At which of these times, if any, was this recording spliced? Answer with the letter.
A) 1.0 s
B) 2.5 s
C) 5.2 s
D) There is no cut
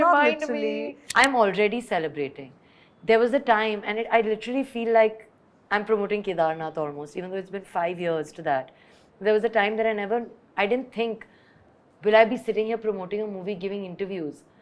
A